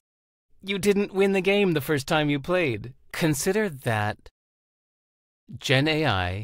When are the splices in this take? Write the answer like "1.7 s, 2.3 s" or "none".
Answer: 2.9 s